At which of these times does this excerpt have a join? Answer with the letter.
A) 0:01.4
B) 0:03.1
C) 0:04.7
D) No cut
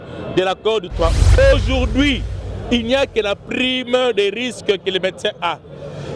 A